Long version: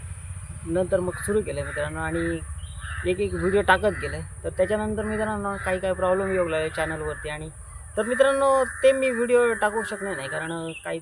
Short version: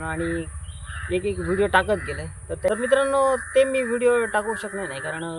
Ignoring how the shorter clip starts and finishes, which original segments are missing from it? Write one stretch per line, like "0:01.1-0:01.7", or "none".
0:04.6-0:08.0

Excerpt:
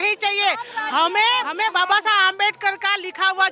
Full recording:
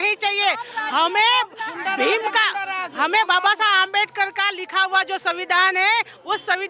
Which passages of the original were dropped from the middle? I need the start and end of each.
0:01.5-0:03.1

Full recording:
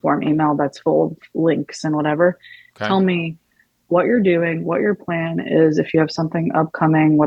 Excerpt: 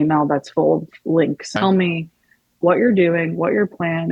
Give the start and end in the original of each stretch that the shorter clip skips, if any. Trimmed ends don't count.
0:01.7-0:02.7

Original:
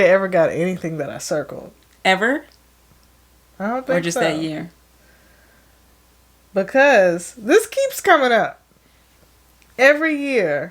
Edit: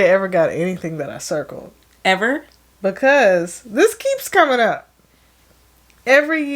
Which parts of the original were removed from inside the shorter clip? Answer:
0:02.6-0:06.3

